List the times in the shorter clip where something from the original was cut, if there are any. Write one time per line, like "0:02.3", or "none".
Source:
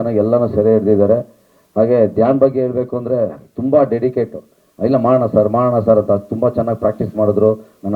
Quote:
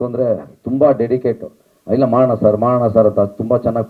none